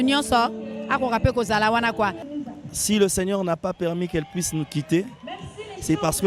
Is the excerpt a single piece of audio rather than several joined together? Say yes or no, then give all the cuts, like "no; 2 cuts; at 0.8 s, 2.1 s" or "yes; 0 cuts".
no; 1 cut; at 2.2 s